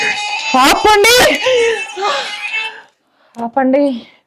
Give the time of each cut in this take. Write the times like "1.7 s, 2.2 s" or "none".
none